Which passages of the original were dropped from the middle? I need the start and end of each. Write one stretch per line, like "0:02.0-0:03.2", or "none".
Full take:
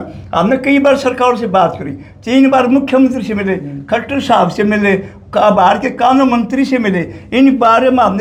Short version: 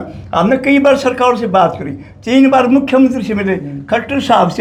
none